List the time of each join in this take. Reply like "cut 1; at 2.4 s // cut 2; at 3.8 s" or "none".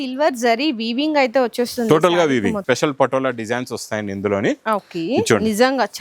cut 1; at 2.6 s